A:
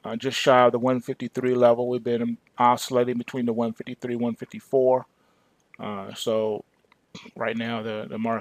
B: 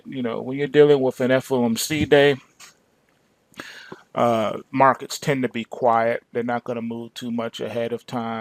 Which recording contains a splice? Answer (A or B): A